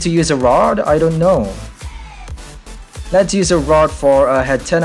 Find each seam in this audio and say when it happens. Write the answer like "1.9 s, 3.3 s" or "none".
2.7 s